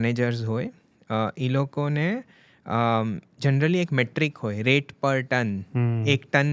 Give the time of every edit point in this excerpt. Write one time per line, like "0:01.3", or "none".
none